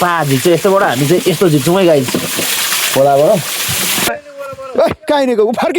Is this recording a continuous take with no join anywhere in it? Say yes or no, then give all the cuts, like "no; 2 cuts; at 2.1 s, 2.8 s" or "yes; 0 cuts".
no; 1 cut; at 4.3 s